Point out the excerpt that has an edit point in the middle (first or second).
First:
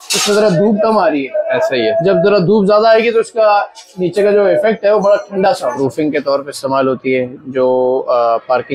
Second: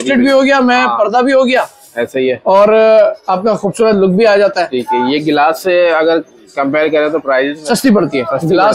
first